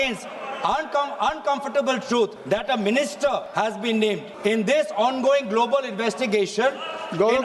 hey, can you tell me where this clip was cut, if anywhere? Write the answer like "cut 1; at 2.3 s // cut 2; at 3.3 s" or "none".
cut 1; at 2.4 s // cut 2; at 3.5 s // cut 3; at 4.3 s